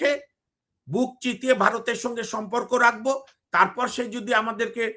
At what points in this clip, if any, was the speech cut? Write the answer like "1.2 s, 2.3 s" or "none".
none